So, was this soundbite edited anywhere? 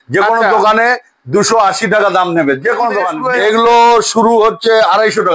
yes; 1 cut; at 3.1 s

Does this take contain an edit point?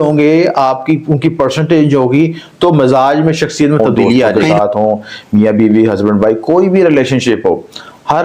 yes; 1 cut; at 4.4 s

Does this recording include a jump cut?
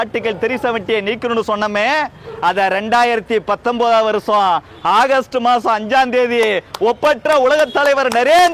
no; 0 cuts

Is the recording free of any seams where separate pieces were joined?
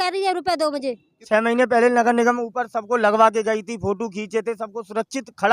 no; 1 cut; at 1.2 s

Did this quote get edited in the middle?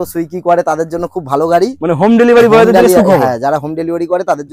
no; 0 cuts

